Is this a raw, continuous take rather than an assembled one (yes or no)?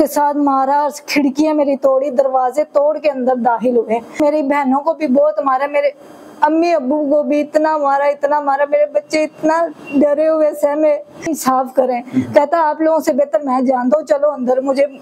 no